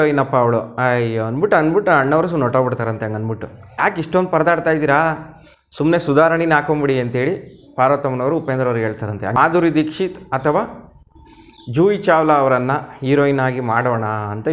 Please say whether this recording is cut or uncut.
cut